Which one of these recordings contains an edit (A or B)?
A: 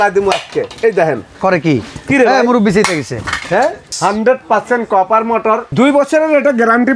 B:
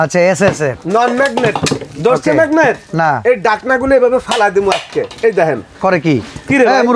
A